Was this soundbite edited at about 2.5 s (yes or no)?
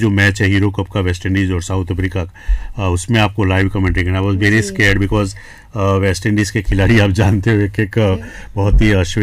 no